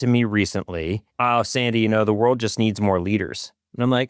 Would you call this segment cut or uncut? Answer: cut